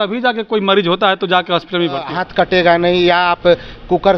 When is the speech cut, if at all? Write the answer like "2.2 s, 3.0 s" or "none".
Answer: 2.1 s